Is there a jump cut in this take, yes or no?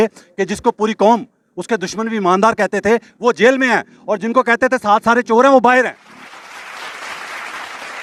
no